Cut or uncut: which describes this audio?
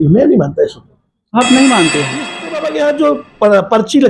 cut